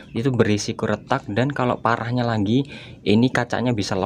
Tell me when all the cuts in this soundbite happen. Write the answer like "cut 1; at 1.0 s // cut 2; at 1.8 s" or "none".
none